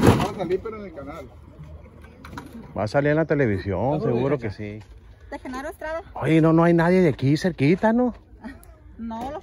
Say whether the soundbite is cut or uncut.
cut